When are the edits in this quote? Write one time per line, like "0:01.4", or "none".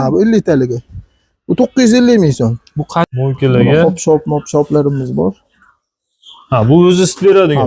0:03.1